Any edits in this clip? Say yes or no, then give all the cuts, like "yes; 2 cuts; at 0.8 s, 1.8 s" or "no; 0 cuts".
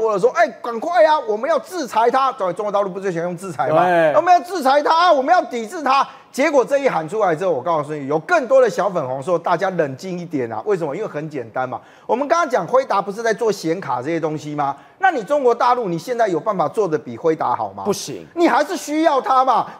no; 0 cuts